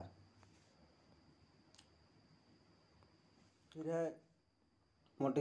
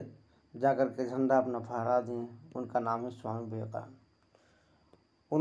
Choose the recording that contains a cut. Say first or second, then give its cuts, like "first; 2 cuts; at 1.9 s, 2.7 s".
first; 1 cut; at 3.7 s